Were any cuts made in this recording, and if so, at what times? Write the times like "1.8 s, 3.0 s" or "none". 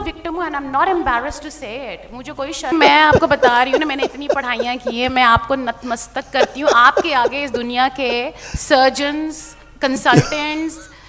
2.7 s